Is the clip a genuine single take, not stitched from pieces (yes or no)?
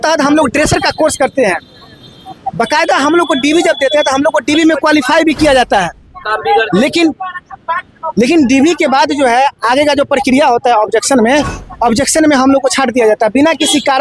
yes